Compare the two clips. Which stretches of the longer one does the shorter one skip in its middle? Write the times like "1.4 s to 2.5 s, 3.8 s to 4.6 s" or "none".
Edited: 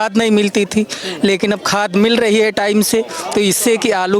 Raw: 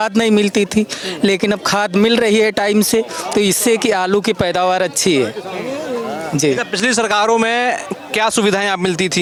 none